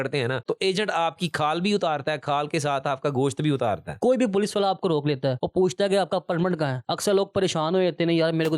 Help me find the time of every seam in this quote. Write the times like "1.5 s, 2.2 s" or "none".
3.9 s, 6.9 s